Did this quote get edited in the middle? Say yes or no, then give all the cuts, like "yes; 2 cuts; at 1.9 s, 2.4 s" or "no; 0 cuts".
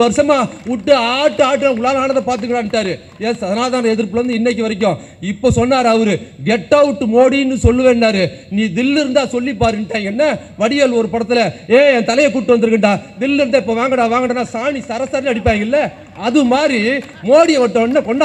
no; 0 cuts